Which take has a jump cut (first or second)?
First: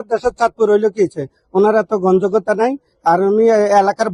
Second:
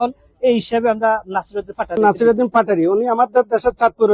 second